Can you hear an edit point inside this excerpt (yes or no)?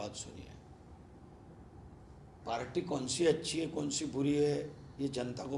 no